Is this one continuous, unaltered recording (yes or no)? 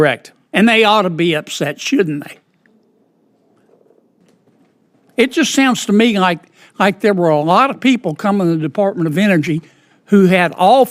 no